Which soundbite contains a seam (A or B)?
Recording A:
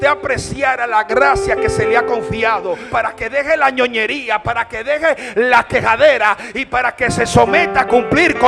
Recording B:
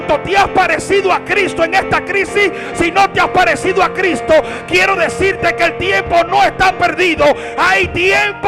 A